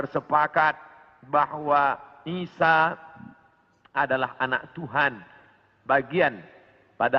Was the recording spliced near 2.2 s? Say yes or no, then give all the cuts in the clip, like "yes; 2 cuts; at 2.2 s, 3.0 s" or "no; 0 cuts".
no; 0 cuts